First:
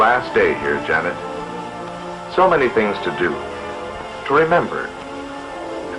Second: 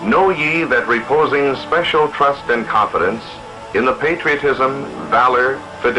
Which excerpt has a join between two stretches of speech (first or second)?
second